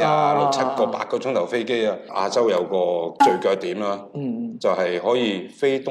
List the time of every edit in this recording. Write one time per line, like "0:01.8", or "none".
0:02.1